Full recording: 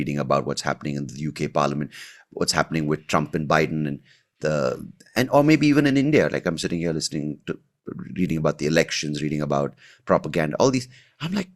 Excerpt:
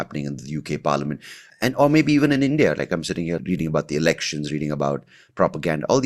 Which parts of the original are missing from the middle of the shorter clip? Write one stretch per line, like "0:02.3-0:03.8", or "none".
0:02.1-0:04.9
0:06.9-0:08.1